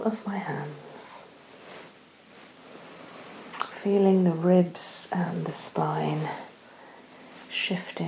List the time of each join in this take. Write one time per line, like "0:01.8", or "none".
none